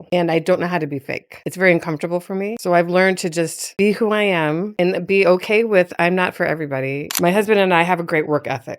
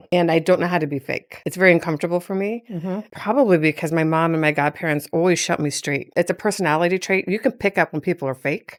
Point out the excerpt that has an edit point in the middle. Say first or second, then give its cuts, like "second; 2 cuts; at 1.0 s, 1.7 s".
first; 3 cuts; at 2.6 s, 4.7 s, 7.1 s